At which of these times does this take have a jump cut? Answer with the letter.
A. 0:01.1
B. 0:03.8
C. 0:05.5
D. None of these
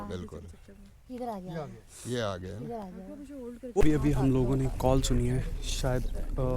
B